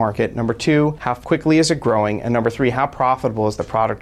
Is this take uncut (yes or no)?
no